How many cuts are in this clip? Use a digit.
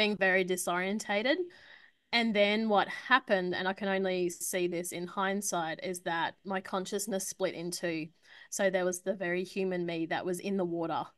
0